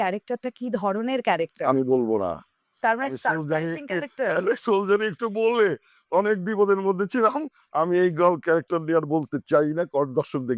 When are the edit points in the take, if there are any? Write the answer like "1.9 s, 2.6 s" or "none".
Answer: none

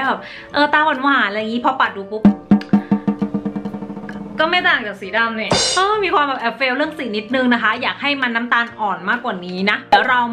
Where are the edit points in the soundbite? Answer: none

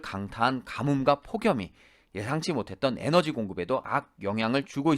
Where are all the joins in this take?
3.9 s

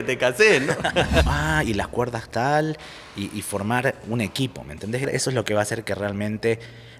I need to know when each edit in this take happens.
1.3 s, 5.1 s

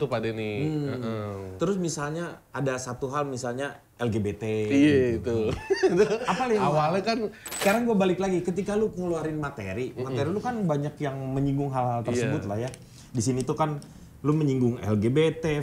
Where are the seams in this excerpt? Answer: 7.4 s

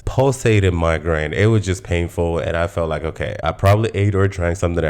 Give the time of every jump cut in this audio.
3.4 s

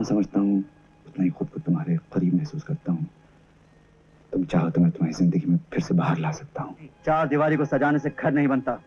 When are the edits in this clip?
6.9 s

